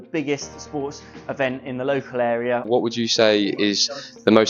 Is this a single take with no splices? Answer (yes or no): no